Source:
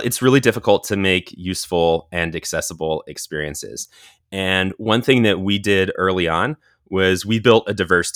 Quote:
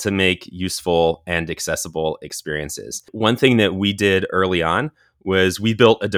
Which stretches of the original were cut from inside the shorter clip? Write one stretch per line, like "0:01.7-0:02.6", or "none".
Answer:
0:04.0-0:04.8